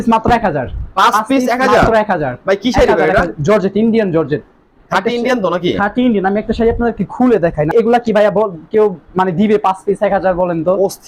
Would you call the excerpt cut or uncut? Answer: uncut